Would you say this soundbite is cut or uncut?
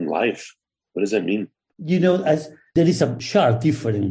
cut